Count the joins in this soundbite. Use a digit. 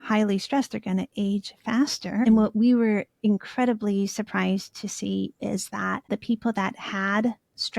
2